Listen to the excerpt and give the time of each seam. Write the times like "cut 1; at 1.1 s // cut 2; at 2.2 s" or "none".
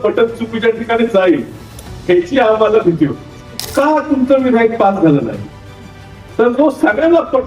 cut 1; at 3.6 s